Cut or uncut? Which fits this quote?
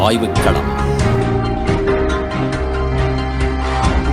uncut